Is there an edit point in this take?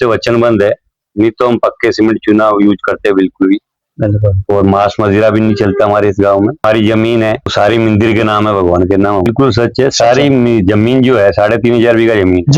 yes; 3 cuts; at 6.6 s, 7.5 s, 9.2 s

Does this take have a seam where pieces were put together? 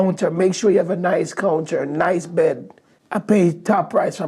no; 0 cuts

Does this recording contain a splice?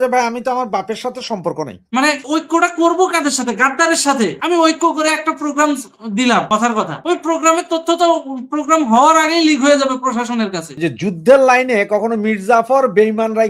yes; 2 cuts; at 1.9 s, 10.6 s

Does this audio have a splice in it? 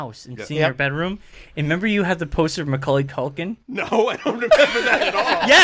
no; 0 cuts

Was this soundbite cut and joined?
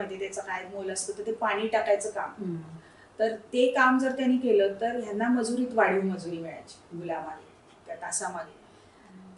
no; 0 cuts

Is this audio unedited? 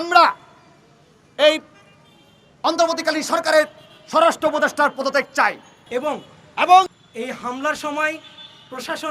no; 1 cut; at 6.9 s

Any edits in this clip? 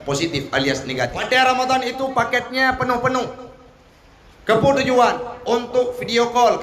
yes; 1 cut; at 1.2 s

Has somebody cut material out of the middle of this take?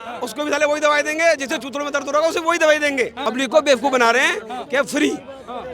yes; 1 cut; at 3.2 s

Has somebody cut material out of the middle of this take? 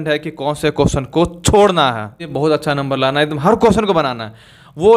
yes; 1 cut; at 2.3 s

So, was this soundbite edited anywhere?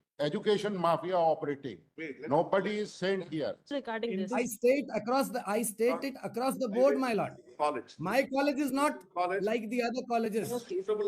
yes; 1 cut; at 3.7 s

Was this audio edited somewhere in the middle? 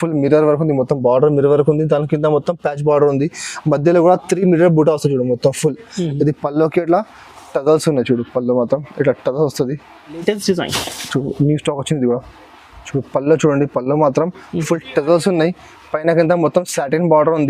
yes; 1 cut; at 10.2 s

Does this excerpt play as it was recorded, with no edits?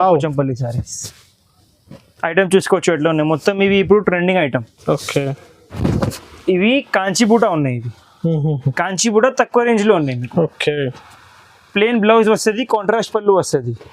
no; 1 cut; at 5.8 s

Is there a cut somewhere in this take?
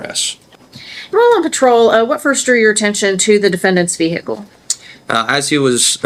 no; 0 cuts

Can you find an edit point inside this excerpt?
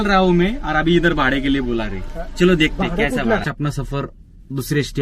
yes; 1 cut; at 3.4 s

